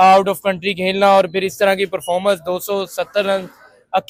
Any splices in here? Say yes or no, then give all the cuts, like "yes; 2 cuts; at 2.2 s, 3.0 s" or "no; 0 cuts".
no; 0 cuts